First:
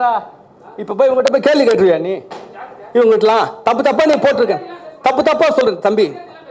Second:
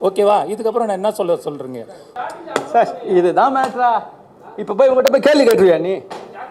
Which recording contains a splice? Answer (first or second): second